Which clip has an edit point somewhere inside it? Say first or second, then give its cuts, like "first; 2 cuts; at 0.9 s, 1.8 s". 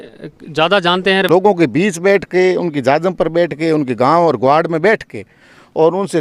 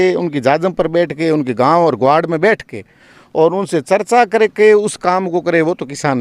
first; 1 cut; at 1.3 s